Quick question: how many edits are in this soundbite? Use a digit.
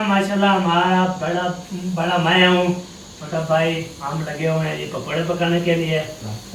0